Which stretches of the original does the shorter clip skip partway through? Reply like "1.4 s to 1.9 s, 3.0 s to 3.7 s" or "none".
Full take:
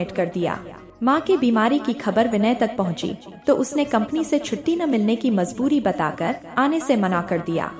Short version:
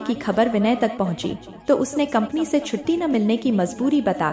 none